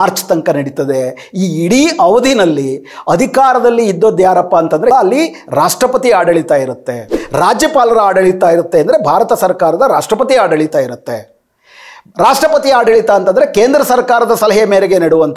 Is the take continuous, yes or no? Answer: no